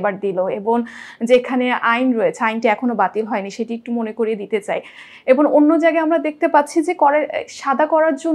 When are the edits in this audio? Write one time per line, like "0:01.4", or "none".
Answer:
none